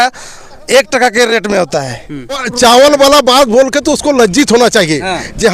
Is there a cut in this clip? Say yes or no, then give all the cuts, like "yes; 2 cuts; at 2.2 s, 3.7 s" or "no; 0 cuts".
yes; 1 cut; at 2.5 s